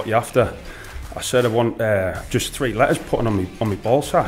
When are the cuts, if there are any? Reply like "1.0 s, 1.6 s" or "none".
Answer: none